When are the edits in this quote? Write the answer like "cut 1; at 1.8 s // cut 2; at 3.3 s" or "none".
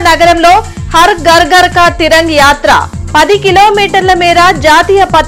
none